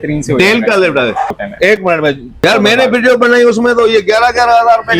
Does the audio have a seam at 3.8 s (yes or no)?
no